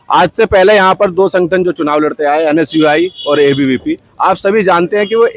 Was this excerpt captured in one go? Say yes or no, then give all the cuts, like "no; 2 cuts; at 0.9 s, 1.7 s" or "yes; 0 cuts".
yes; 0 cuts